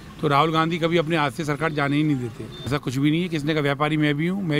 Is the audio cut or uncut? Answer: cut